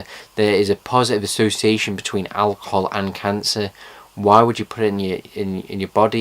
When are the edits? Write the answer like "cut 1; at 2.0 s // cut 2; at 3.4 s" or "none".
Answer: cut 1; at 4.4 s